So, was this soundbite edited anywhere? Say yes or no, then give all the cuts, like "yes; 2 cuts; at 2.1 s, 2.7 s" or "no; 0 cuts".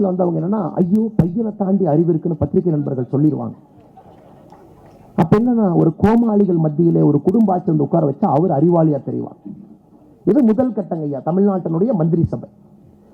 no; 0 cuts